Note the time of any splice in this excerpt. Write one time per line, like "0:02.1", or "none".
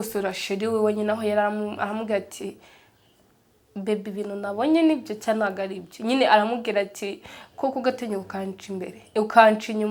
none